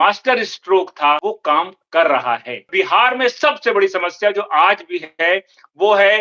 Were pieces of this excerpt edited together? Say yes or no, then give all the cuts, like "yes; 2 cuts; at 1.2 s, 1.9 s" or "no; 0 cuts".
yes; 2 cuts; at 1.2 s, 2.7 s